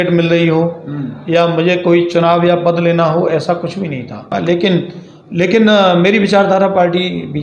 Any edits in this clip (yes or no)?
yes